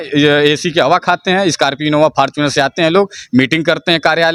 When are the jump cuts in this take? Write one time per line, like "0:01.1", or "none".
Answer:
none